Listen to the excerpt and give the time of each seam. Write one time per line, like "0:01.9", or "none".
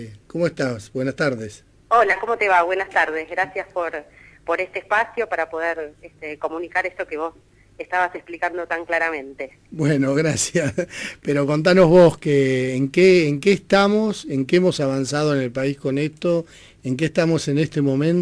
none